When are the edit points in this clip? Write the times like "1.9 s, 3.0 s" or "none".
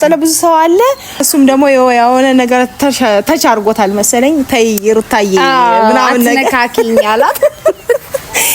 1.2 s